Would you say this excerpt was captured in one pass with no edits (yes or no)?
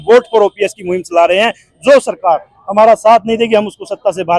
yes